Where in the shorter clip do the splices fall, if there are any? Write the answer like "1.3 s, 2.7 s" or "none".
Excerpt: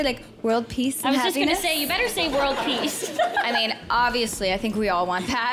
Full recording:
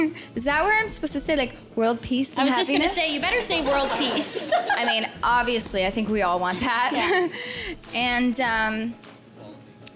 none